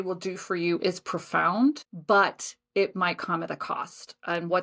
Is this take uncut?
no; 1 cut; at 1.9 s

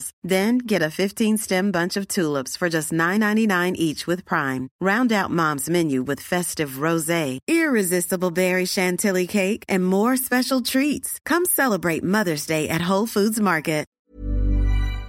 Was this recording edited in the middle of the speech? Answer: yes; 1 cut; at 14.0 s

